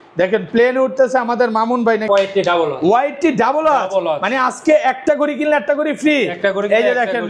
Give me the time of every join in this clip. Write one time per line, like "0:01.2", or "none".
0:02.1